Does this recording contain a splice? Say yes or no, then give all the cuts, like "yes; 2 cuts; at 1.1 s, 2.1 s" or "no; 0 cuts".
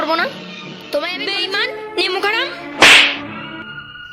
yes; 1 cut; at 1.2 s